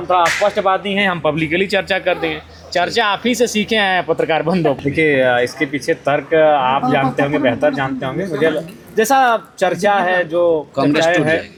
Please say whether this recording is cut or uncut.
uncut